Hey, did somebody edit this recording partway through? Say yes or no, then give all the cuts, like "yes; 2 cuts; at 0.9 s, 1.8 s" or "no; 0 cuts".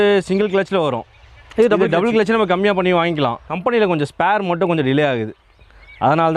yes; 1 cut; at 3.4 s